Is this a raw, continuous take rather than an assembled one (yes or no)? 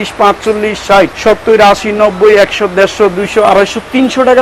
no